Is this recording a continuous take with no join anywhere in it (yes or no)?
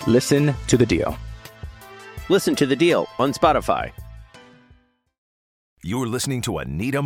no